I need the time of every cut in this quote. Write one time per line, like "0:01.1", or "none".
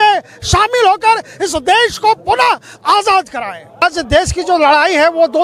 0:03.8